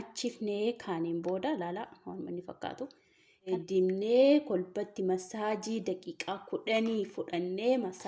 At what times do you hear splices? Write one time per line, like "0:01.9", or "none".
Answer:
0:03.5